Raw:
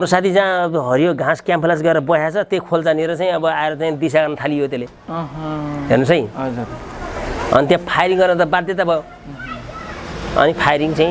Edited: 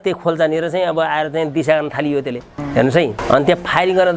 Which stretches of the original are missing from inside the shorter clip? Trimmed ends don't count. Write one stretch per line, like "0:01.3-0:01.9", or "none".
0:05.0-0:05.7
0:06.3-0:07.4